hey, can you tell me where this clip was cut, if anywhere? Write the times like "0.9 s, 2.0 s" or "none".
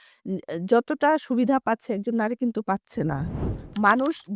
3.4 s